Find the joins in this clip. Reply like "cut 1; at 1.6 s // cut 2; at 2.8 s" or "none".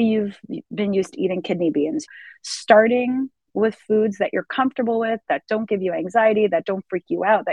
cut 1; at 2.1 s